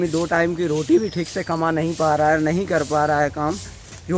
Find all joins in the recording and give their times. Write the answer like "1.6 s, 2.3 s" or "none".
none